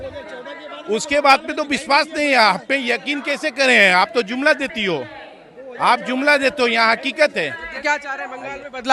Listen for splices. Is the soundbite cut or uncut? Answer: cut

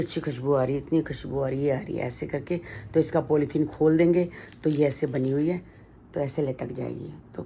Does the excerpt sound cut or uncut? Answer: uncut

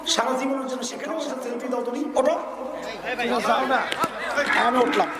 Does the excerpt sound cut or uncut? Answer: cut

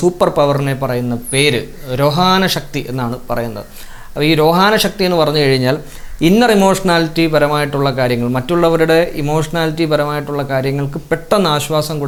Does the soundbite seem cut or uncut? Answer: uncut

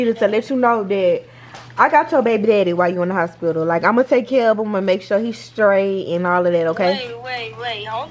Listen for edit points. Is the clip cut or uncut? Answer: uncut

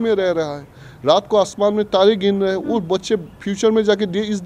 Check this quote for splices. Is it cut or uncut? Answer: uncut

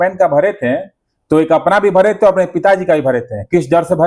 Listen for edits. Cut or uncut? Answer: uncut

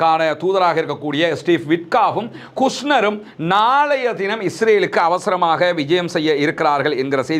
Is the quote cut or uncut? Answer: uncut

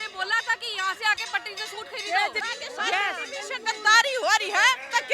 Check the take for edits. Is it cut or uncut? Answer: cut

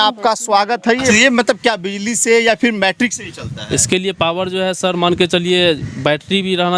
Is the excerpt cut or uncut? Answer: cut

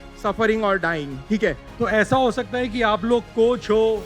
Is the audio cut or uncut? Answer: cut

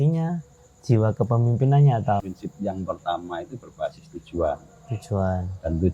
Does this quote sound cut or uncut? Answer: cut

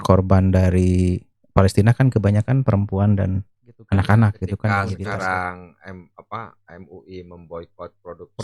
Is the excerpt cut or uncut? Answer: cut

